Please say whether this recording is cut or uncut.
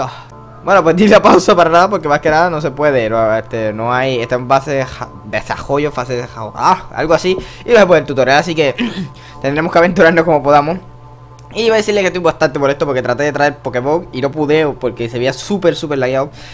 cut